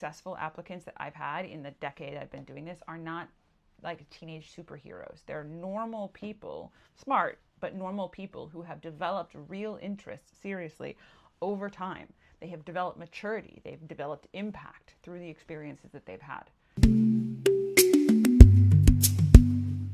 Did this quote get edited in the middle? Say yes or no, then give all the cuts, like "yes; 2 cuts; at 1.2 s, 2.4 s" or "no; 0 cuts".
yes; 1 cut; at 16.6 s